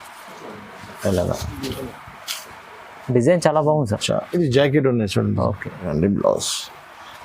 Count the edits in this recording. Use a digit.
1